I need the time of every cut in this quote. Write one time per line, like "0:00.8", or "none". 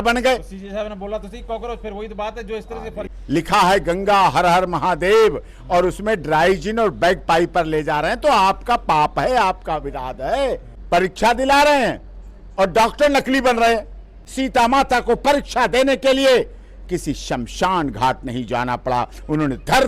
0:03.1
0:10.7
0:14.2